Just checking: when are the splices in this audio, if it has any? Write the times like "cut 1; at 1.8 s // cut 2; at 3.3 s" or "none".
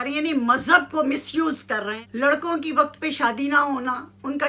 cut 1; at 2.0 s